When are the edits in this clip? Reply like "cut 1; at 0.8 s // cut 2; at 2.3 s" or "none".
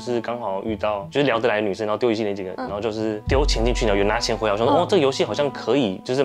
none